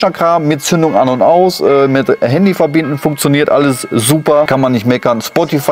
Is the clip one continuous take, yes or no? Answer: no